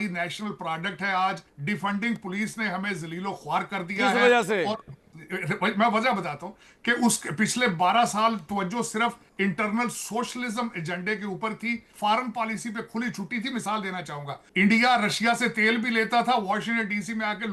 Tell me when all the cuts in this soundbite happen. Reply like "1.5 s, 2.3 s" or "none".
none